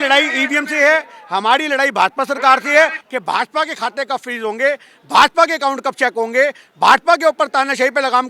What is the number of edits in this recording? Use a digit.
1